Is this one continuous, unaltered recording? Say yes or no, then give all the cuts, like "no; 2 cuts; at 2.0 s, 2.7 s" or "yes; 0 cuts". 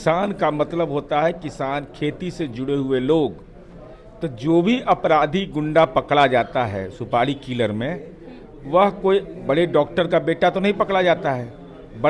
yes; 0 cuts